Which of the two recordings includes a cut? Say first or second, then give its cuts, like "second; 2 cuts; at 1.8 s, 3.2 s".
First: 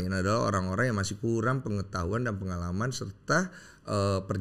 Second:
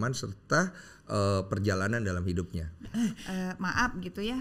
second; 1 cut; at 2.8 s